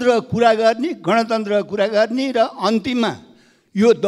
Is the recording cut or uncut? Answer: uncut